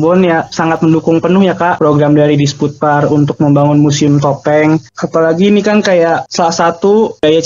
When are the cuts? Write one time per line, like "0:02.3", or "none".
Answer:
none